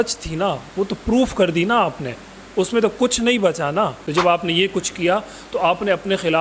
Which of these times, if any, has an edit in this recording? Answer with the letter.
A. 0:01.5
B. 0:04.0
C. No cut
B